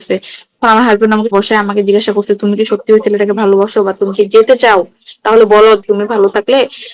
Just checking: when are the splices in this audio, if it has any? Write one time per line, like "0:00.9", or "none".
0:01.3
0:05.8